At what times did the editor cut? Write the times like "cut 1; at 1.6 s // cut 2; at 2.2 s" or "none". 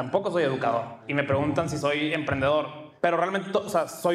cut 1; at 1.0 s // cut 2; at 2.8 s

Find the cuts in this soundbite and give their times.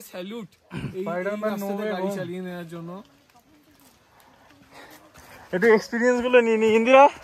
none

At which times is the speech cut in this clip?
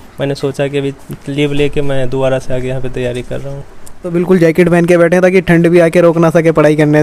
cut 1; at 4.0 s

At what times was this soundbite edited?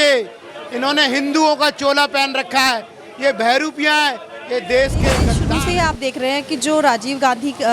cut 1; at 5.4 s

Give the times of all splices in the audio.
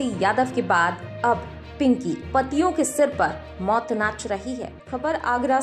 cut 1; at 4.7 s

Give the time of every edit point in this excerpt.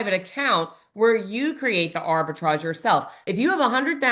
cut 1; at 3.1 s

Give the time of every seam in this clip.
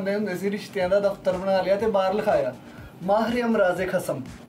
none

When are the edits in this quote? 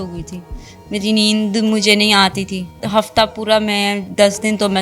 cut 1; at 2.8 s

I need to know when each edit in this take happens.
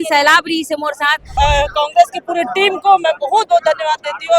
cut 1; at 1.3 s

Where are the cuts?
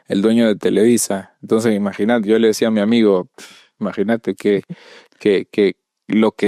none

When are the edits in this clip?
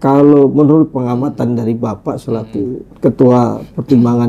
cut 1; at 0.9 s // cut 2; at 2.8 s

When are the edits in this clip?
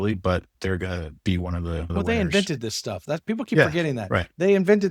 cut 1; at 1.9 s

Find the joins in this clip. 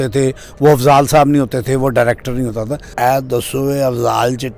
cut 1; at 2.8 s

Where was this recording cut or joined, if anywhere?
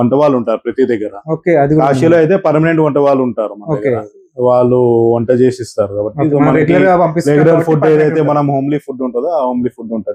none

